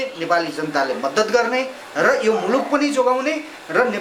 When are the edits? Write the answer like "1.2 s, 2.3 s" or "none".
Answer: none